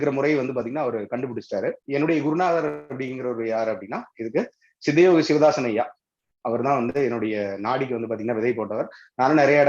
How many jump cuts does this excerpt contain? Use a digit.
1